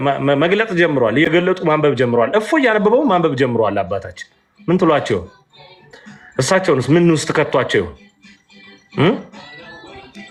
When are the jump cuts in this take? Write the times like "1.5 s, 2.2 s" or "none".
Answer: none

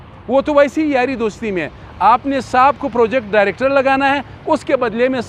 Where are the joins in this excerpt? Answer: none

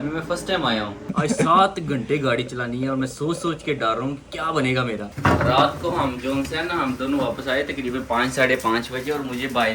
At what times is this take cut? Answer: 1.1 s, 5.1 s

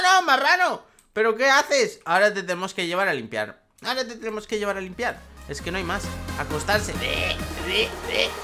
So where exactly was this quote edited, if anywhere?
none

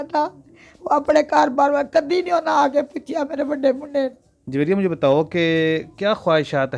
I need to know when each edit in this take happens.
4.3 s

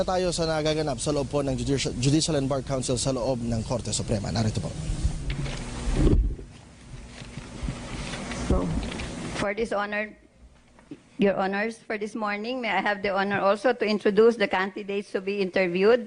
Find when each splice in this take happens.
2.8 s

